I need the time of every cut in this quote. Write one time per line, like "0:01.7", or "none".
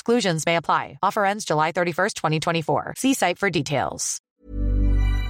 0:04.3